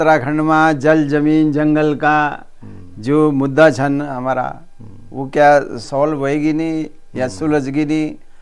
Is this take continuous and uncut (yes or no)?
no